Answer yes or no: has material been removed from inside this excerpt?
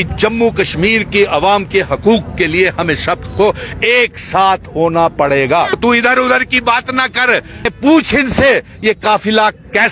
yes